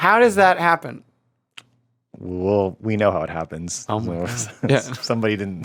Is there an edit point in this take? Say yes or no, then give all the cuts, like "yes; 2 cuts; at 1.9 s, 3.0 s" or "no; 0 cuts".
no; 0 cuts